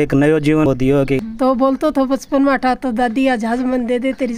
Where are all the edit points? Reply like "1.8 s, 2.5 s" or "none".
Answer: 1.3 s